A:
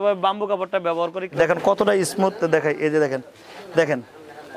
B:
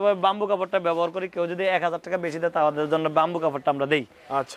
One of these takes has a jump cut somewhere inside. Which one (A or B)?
A